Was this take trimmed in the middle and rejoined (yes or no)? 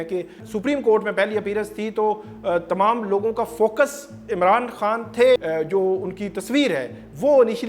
yes